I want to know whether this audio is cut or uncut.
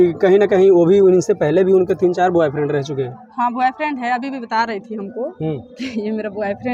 uncut